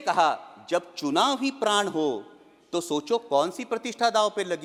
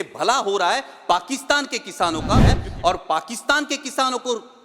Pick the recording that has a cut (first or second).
second